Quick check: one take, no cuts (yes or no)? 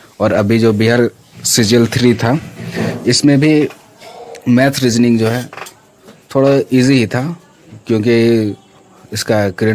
yes